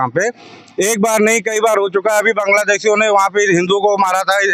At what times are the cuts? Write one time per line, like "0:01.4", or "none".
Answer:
none